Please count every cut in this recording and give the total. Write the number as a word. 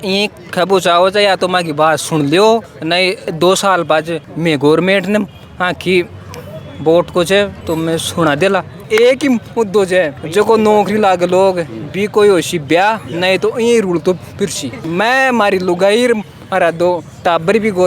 three